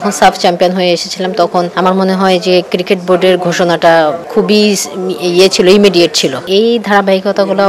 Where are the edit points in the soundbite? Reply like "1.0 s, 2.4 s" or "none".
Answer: 1.7 s, 4.2 s, 6.5 s